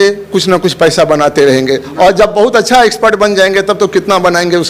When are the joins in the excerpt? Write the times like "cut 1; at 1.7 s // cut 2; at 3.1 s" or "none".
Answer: none